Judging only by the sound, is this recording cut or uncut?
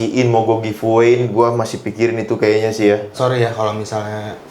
cut